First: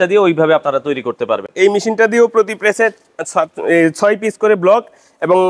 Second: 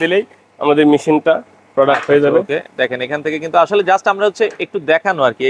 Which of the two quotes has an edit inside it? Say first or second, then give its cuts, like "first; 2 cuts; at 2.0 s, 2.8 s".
first; 1 cut; at 1.5 s